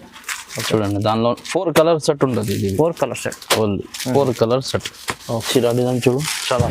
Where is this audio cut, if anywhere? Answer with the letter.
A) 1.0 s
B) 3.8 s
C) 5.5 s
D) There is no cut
C